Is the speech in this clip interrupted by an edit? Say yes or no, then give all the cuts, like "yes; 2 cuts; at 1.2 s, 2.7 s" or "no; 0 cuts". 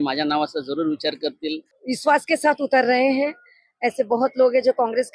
yes; 1 cut; at 1.7 s